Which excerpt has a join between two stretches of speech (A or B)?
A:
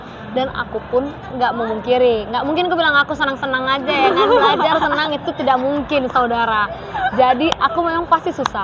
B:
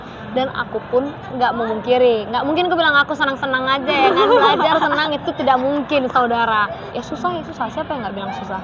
B